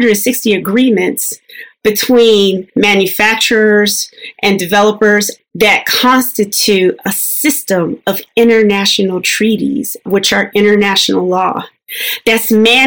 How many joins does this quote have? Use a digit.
2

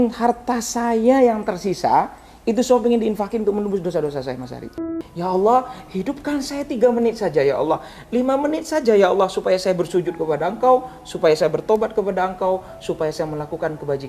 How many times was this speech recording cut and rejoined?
1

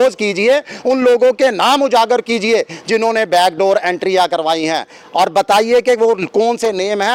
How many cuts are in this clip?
0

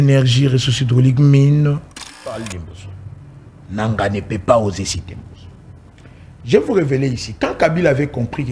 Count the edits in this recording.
1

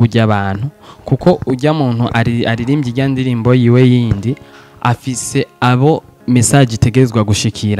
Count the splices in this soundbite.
0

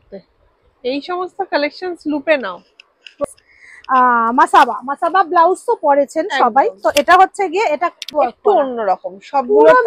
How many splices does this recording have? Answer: 2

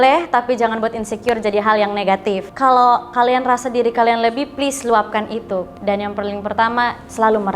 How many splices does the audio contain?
2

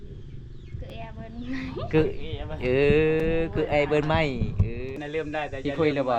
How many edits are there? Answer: 1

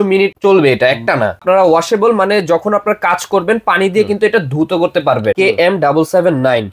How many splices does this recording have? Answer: 2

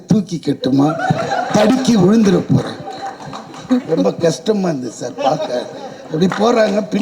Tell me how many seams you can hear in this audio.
0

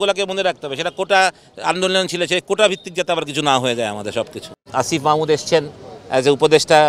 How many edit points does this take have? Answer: 1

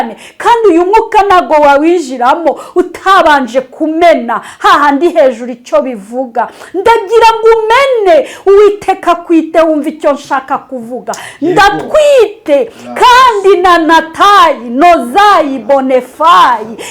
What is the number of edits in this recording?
0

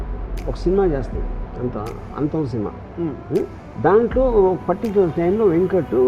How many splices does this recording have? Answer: 1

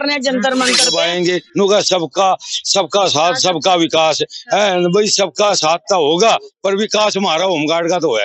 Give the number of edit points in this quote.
1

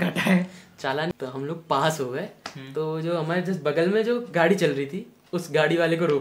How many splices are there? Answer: 1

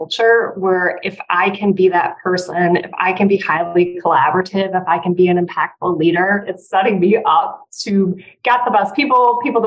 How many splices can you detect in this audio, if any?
1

